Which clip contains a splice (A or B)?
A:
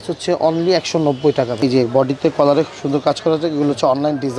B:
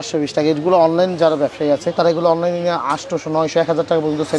A